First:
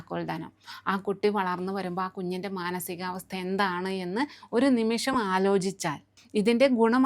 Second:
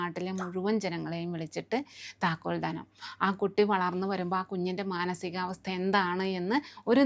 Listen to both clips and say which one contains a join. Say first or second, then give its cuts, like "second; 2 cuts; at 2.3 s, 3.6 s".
first; 1 cut; at 6.1 s